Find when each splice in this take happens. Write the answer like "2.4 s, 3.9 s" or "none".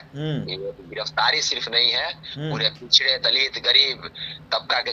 none